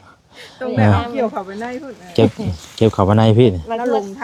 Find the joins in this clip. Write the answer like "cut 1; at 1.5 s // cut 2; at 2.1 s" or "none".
none